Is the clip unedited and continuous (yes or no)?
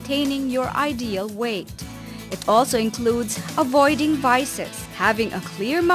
no